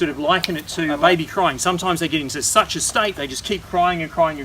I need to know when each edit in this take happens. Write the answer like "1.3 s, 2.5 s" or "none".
0.9 s